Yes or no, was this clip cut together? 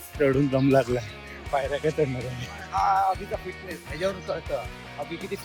no